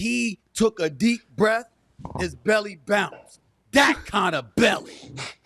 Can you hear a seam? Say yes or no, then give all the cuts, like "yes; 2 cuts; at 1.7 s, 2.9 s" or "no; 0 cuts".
no; 0 cuts